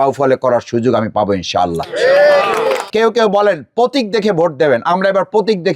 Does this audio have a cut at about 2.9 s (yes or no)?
yes